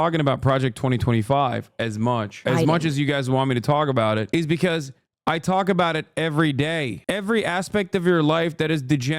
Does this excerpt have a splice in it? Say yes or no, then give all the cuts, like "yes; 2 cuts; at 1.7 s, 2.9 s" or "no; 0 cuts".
yes; 2 cuts; at 2.4 s, 7.0 s